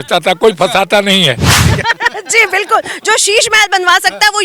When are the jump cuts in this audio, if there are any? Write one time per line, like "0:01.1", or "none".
0:01.7